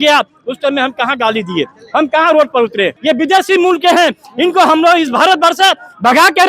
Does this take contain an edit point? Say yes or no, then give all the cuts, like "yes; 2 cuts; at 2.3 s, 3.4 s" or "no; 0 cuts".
yes; 1 cut; at 2.9 s